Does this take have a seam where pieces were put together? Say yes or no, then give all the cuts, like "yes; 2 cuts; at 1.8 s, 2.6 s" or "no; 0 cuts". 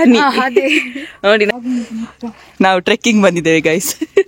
yes; 1 cut; at 1.5 s